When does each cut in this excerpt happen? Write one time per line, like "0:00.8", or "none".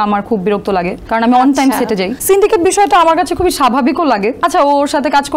0:01.0
0:02.1
0:04.4